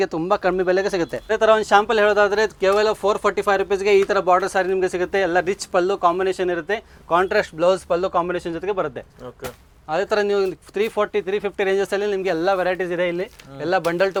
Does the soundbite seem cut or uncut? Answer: uncut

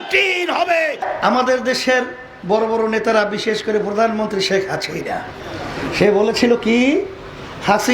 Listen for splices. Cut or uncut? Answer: cut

